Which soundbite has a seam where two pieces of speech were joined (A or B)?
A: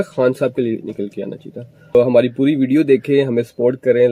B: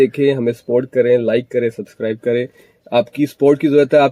A